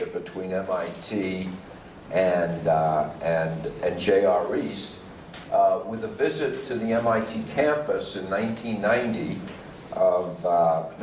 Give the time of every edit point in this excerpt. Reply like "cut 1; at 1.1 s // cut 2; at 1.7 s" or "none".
cut 1; at 6.6 s